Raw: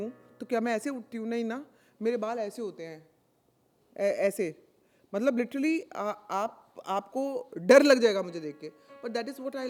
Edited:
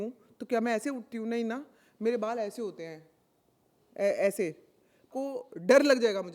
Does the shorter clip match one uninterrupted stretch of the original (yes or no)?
no